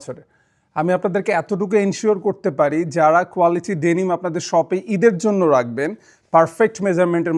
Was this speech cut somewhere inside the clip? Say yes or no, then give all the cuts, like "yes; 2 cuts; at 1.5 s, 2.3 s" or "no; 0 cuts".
no; 0 cuts